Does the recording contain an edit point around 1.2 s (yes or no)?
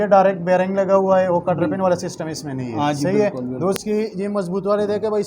no